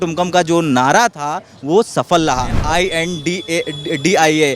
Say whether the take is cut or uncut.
cut